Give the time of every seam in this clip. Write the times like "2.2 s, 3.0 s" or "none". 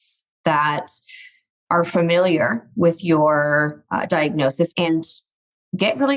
4.8 s